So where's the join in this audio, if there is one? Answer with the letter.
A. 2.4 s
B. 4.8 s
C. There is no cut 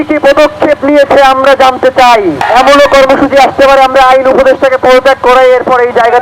A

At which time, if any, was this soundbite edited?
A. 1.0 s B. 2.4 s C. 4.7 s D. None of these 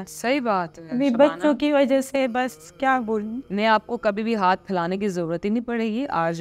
D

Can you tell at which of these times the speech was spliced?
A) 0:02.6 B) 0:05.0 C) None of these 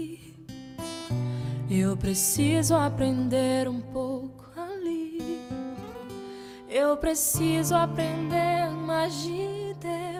C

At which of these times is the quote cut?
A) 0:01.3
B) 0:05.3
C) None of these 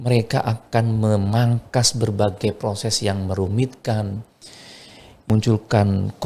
B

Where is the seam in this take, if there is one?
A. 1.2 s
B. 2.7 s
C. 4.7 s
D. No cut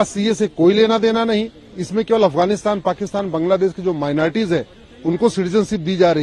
D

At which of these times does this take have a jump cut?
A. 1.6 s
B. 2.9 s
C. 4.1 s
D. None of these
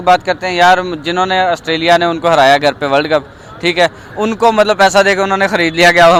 D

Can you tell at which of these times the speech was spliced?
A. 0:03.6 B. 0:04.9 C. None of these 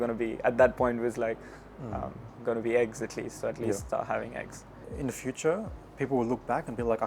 B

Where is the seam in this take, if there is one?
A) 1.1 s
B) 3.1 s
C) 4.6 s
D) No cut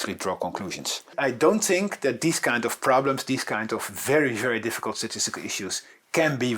A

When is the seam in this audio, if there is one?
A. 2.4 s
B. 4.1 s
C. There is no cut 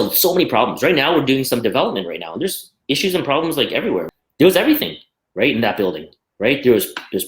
B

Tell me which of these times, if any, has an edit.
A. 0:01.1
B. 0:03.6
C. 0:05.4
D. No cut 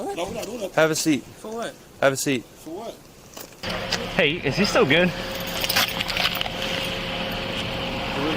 B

